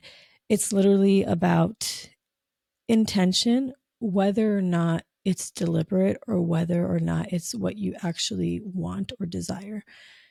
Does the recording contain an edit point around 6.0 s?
no; 0 cuts

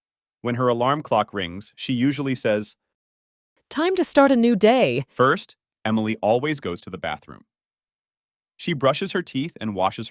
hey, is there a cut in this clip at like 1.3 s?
no; 2 cuts; at 2.8 s, 5.1 s

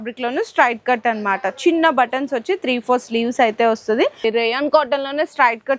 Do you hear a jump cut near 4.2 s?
yes; 1 cut; at 4.2 s

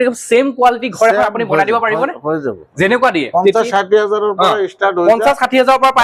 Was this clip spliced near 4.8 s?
no; 1 cut; at 3.3 s

